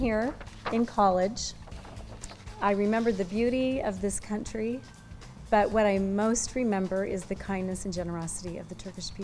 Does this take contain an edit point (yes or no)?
no